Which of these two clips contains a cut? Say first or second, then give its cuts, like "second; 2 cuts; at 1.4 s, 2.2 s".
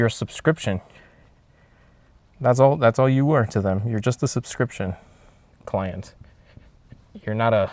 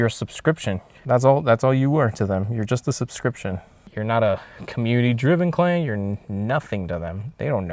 second; 2 cuts; at 0.9 s, 3.8 s